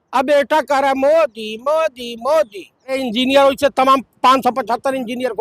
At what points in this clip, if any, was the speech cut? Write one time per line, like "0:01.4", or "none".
0:02.9